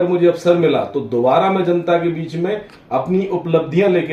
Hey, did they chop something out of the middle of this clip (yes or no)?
no